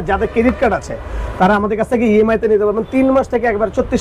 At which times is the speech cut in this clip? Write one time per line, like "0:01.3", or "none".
none

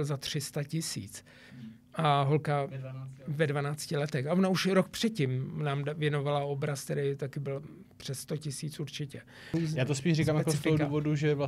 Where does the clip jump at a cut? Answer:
0:09.5

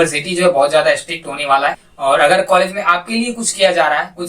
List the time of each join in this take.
0:01.9

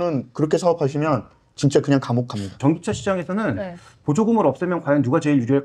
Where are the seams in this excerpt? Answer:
0:02.6

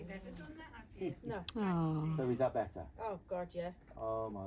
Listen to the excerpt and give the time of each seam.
none

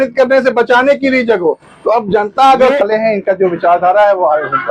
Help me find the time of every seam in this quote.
0:02.8

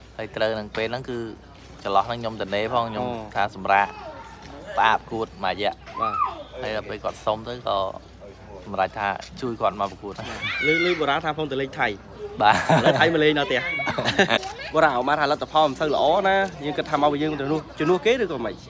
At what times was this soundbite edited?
0:14.4

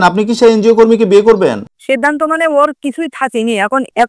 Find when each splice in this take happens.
none

